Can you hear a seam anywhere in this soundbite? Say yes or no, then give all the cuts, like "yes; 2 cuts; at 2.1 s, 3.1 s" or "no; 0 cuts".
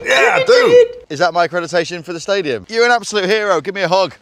yes; 2 cuts; at 1.0 s, 2.6 s